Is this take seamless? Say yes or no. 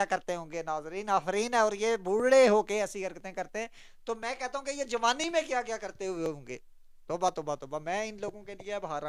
yes